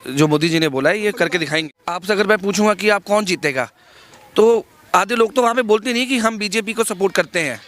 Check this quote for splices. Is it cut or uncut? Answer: cut